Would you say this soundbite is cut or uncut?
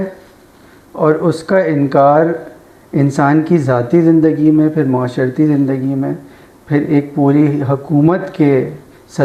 uncut